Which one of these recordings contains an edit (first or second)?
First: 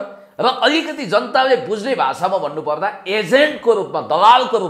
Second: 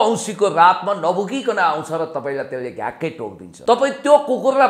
second